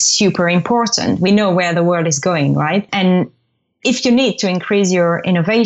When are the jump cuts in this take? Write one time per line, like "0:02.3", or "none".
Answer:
0:01.3
0:02.9